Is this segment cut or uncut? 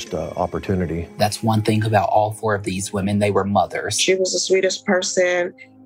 cut